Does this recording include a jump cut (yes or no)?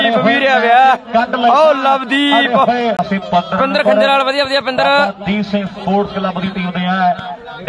yes